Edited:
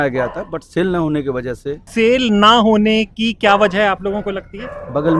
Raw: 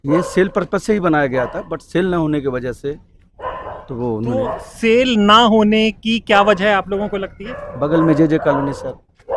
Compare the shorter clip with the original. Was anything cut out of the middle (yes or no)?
yes